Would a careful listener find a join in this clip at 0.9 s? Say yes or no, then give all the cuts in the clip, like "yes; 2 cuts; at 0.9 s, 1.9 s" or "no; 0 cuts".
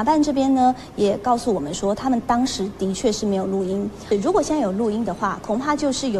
no; 1 cut; at 4.0 s